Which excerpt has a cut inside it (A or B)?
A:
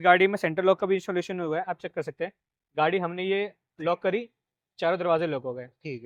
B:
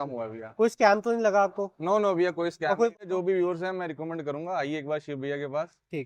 B